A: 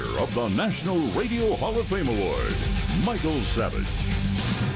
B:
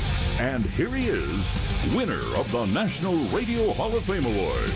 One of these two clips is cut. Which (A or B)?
A